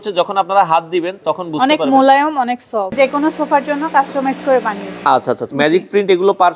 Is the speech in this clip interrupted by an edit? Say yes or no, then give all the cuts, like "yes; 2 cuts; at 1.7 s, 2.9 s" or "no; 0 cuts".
yes; 2 cuts; at 2.9 s, 5.4 s